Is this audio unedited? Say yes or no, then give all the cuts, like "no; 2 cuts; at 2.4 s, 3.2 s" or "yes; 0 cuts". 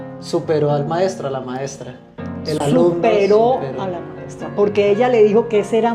yes; 0 cuts